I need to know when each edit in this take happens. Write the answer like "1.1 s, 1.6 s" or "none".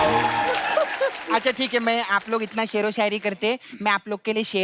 1.2 s